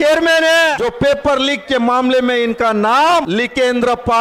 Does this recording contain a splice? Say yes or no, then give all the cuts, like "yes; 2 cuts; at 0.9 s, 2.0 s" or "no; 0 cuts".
yes; 2 cuts; at 0.8 s, 3.3 s